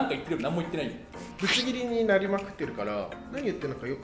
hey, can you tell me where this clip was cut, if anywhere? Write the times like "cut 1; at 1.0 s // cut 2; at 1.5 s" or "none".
cut 1; at 1.3 s